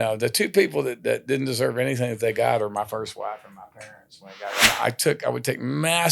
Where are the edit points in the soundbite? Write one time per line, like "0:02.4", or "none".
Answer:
0:04.6